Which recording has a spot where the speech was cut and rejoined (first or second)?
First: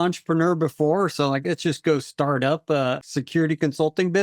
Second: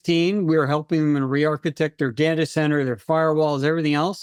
first